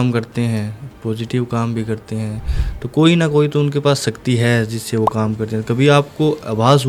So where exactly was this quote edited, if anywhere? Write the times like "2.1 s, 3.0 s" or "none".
none